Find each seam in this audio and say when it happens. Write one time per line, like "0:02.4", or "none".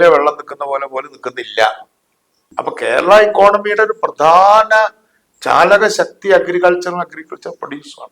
0:02.2